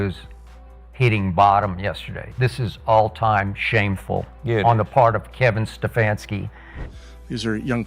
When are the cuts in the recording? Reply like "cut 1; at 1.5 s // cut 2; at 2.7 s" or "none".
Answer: cut 1; at 6.7 s